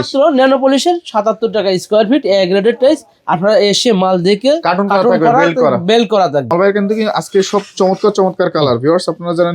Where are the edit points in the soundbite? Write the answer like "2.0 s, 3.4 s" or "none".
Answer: 6.5 s